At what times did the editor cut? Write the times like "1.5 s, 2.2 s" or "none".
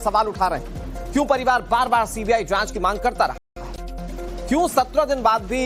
none